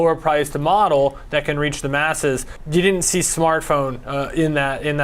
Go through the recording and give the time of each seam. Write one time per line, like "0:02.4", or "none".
0:02.6